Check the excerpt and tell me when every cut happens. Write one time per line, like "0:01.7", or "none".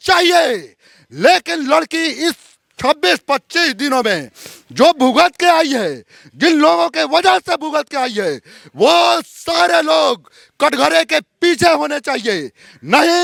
none